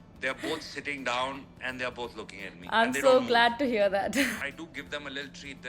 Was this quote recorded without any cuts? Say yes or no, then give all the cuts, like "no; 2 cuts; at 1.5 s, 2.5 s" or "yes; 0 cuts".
no; 1 cut; at 4.4 s